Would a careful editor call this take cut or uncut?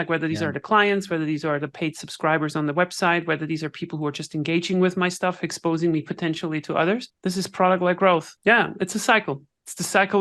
cut